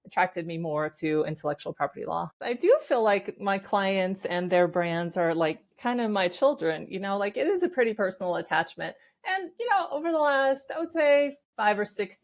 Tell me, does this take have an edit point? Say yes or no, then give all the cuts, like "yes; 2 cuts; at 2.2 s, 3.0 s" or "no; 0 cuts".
yes; 1 cut; at 2.4 s